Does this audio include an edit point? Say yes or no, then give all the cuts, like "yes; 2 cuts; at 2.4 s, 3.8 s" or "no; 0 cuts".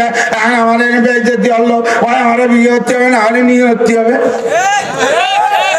no; 0 cuts